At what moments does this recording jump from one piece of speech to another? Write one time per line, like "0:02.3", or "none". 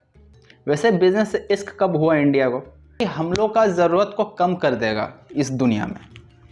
0:03.1